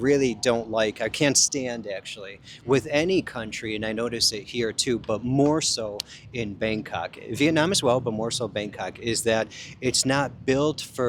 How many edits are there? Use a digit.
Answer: 0